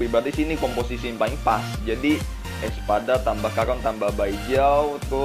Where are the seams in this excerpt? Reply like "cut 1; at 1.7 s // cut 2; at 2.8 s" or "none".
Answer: cut 1; at 2.7 s